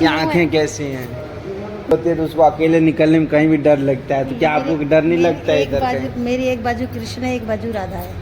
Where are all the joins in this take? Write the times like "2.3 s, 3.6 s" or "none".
1.9 s